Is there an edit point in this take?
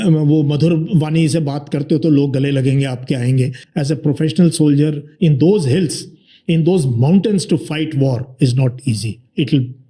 yes; 1 cut; at 3.6 s

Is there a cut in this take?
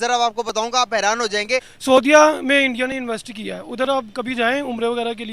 yes; 1 cut; at 1.7 s

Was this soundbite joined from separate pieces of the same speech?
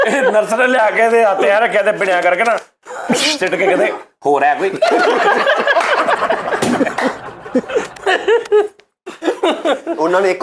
no; 0 cuts

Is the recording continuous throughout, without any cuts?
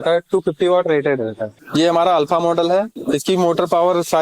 no; 2 cuts; at 1.6 s, 3.0 s

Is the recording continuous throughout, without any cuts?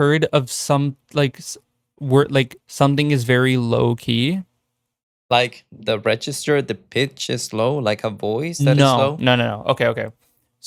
yes; 0 cuts

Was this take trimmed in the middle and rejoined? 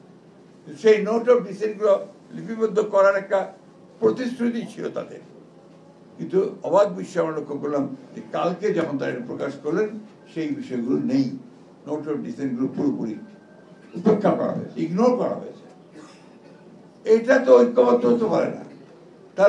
no; 0 cuts

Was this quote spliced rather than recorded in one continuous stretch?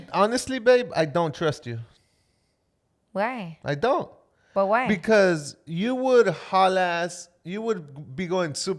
no; 0 cuts

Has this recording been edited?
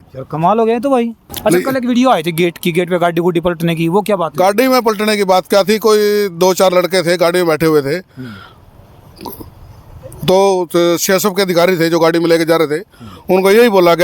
yes; 1 cut; at 1.2 s

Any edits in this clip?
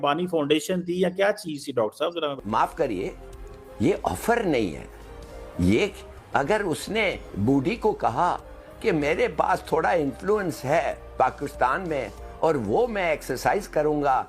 yes; 1 cut; at 2.4 s

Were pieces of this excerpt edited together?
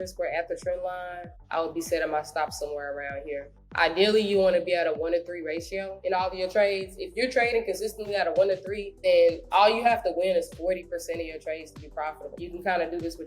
yes; 4 cuts; at 1.4 s, 5.9 s, 8.8 s, 12.3 s

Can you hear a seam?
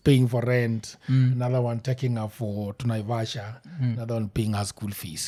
no; 0 cuts

